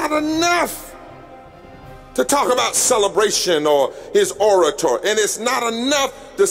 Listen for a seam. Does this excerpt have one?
no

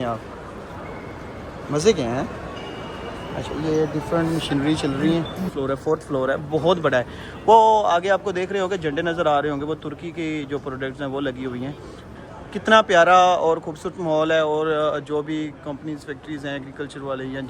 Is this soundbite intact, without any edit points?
no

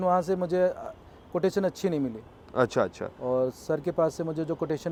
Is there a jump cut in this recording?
no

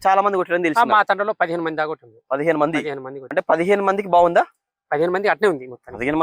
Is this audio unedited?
no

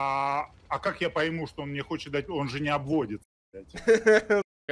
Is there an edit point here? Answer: no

